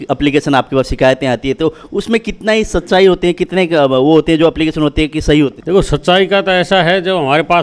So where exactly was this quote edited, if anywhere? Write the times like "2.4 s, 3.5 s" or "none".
5.6 s